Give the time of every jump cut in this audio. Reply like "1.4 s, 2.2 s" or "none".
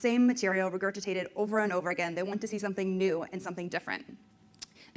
3.0 s